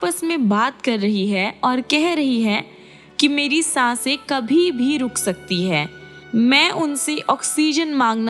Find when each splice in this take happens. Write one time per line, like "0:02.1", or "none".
none